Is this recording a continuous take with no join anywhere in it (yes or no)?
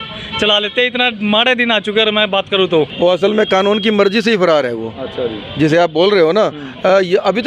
no